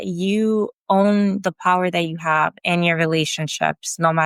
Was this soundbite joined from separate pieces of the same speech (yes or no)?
no